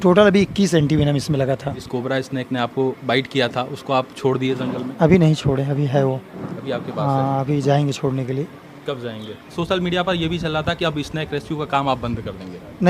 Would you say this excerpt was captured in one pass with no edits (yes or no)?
no